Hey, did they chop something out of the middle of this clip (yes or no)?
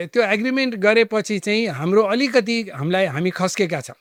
no